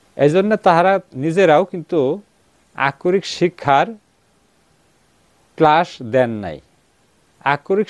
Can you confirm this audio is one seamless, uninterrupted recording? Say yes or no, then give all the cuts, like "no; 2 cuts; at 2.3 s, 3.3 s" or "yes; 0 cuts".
yes; 0 cuts